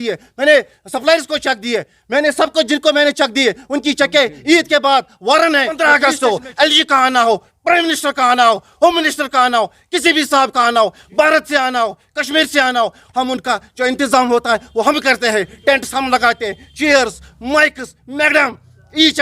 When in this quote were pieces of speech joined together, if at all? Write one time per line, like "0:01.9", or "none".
0:05.8